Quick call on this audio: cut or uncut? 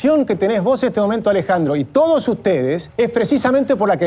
uncut